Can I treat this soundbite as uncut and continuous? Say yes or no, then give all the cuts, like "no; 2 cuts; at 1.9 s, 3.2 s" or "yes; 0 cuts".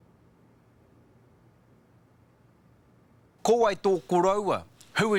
yes; 0 cuts